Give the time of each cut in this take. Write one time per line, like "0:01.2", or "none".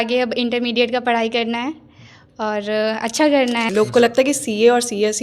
0:03.7